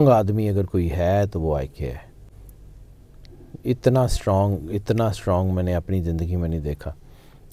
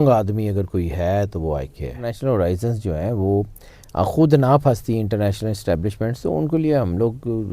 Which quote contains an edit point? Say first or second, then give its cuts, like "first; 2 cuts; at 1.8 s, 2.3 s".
second; 1 cut; at 2.1 s